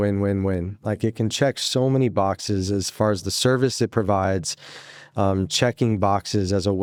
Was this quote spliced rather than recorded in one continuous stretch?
no; 0 cuts

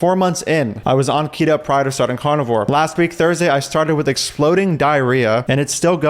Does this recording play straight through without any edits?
yes; 0 cuts

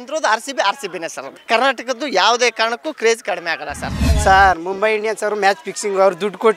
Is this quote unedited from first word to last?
no; 1 cut; at 4.0 s

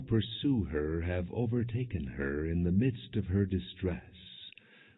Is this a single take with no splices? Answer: yes; 0 cuts

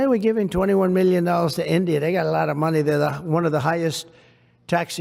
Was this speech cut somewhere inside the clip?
no; 0 cuts

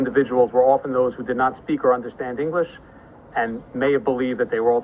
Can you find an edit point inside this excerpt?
no; 0 cuts

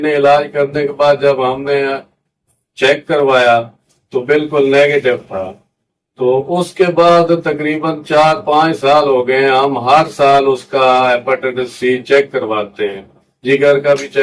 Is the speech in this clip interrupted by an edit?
no; 0 cuts

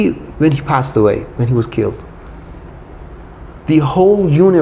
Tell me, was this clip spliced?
no; 0 cuts

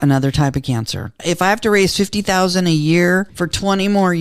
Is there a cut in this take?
yes; 2 cuts; at 1.2 s, 3.3 s

